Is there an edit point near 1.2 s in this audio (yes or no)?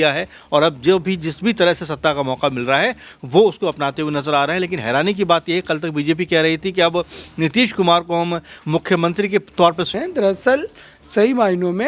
no